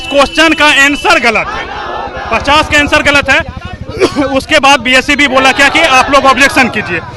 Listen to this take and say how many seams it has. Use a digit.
0